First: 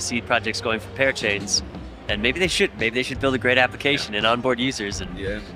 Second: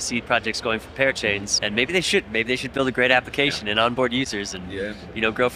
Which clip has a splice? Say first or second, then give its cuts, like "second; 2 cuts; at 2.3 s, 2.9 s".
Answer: second; 1 cut; at 1.5 s